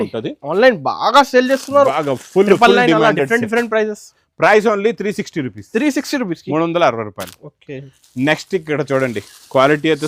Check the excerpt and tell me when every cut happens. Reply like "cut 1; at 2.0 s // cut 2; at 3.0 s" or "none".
none